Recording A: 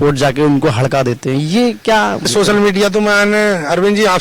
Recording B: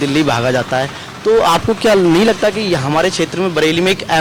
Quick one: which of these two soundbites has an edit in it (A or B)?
A